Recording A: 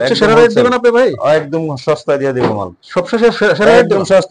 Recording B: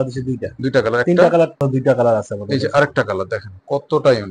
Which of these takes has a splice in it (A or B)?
B